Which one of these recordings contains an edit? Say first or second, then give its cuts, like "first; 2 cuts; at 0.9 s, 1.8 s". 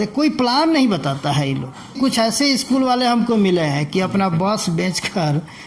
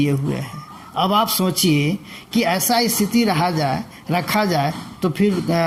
first; 1 cut; at 2.0 s